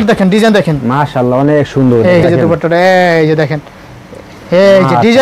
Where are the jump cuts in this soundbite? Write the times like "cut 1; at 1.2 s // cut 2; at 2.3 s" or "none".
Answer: cut 1; at 2.2 s